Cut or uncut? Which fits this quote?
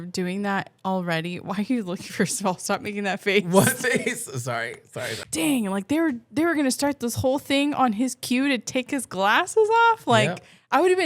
cut